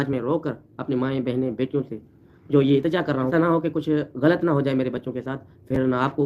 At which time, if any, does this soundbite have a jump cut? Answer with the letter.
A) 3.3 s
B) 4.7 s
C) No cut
A